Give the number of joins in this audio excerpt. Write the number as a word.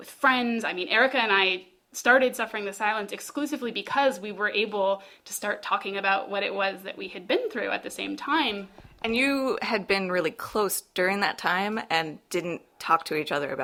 zero